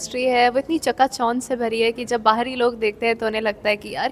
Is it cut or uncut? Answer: uncut